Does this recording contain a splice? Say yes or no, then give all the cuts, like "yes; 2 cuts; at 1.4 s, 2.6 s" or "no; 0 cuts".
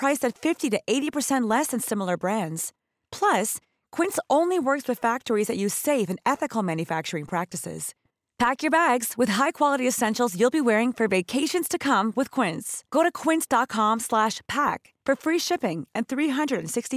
no; 0 cuts